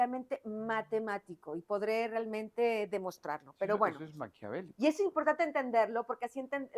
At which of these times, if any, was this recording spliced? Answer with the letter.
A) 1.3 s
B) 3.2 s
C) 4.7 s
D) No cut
D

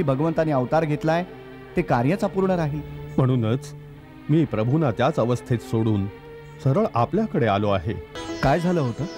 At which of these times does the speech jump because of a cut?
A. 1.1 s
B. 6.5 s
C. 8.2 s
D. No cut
C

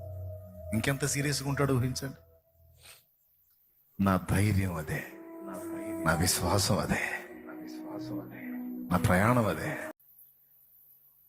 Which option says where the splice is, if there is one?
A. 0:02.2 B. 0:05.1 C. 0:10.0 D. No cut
C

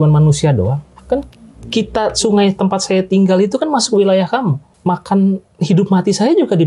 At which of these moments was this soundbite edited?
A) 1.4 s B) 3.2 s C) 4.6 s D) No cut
C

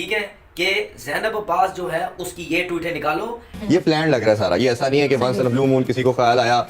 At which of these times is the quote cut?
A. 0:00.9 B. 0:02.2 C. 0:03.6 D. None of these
C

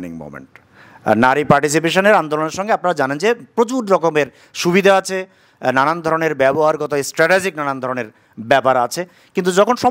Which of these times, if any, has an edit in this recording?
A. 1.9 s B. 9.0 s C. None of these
C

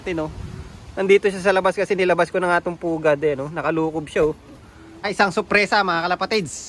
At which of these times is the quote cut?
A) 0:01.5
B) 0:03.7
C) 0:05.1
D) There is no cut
C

